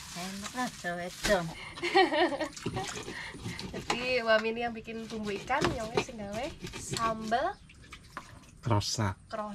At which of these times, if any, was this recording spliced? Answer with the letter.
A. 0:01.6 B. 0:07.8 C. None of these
C